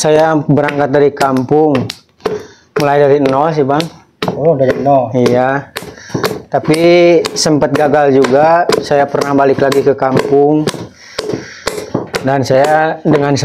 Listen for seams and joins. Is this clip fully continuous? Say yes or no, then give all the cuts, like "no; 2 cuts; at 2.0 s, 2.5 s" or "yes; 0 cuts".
yes; 0 cuts